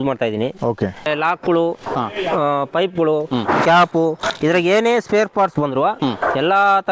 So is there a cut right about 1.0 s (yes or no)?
yes